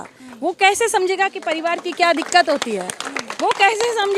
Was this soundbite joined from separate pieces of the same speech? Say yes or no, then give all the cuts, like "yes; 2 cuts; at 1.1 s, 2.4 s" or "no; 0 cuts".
no; 0 cuts